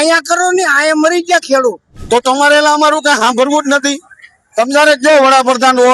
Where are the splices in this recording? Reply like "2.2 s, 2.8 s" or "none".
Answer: 1.9 s

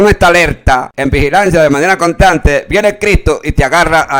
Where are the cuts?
0.9 s

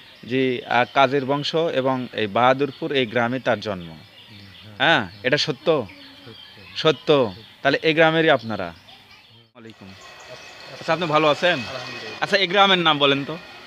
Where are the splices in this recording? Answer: 9.8 s

